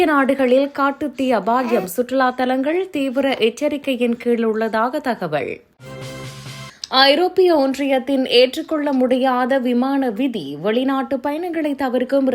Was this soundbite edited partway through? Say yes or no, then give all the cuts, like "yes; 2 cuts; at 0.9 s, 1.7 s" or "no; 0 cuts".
yes; 1 cut; at 5.7 s